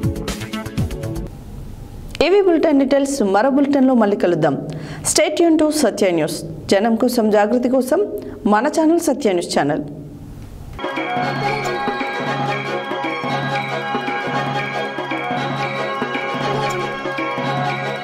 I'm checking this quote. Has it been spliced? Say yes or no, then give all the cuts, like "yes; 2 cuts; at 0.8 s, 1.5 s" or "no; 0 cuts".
no; 0 cuts